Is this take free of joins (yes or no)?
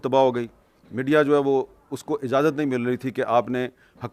yes